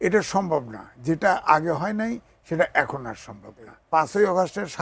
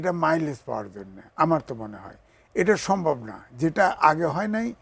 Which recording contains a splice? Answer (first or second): first